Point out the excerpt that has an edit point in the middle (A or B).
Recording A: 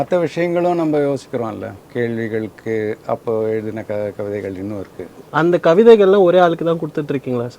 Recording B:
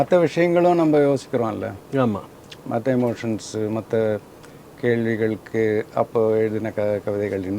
A